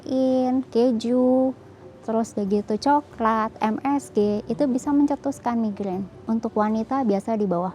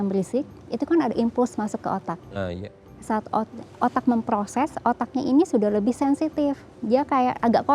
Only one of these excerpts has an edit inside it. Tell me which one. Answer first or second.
first